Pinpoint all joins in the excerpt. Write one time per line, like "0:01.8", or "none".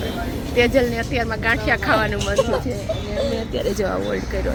none